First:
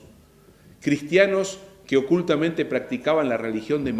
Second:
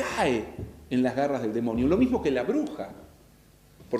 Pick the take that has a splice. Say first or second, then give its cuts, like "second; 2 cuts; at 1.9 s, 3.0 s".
second; 1 cut; at 2.1 s